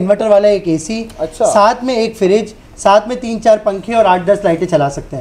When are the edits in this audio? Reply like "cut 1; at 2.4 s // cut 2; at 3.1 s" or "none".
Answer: none